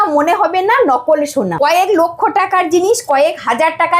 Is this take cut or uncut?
cut